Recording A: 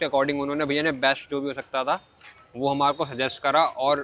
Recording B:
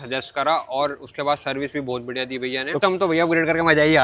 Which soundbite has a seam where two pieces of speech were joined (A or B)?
B